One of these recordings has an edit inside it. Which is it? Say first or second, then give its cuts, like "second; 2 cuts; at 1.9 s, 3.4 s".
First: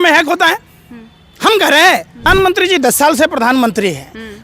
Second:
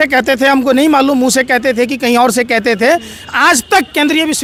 first; 1 cut; at 2.3 s